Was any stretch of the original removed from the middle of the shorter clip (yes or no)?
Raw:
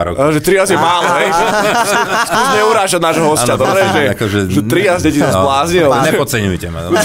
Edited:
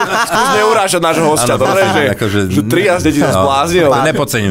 no